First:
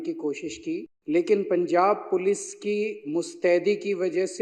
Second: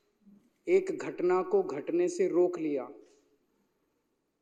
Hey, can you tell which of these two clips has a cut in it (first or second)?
first